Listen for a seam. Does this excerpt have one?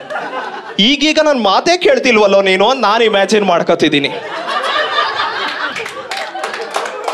yes; 1 cut; at 5.7 s

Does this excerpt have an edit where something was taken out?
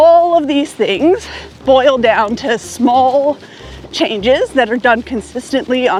no; 0 cuts

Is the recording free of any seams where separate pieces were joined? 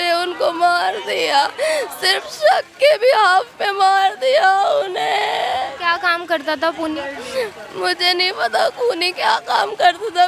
yes; 0 cuts

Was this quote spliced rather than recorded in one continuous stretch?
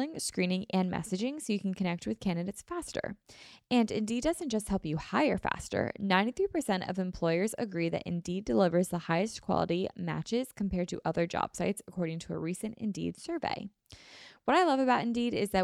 no; 0 cuts

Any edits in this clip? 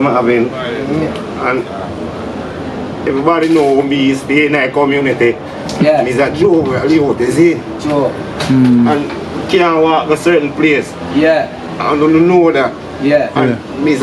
no; 0 cuts

